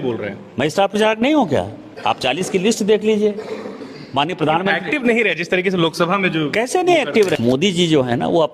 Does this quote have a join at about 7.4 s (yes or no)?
yes